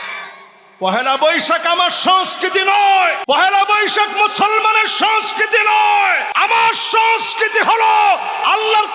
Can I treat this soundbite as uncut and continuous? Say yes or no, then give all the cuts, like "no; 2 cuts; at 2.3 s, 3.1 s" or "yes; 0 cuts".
no; 2 cuts; at 3.2 s, 6.3 s